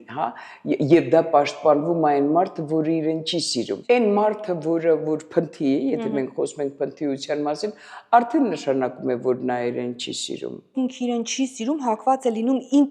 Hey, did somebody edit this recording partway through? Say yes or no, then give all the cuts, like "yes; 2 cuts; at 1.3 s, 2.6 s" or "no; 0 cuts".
yes; 2 cuts; at 3.9 s, 10.7 s